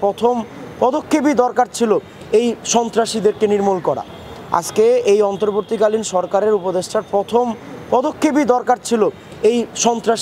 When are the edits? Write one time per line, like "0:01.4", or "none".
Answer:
0:04.2